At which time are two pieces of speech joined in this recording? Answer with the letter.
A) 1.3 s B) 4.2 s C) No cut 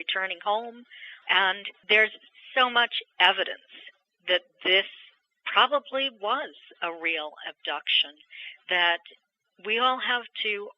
A